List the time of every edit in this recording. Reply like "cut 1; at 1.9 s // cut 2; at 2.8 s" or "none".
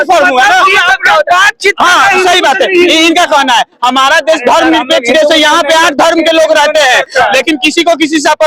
none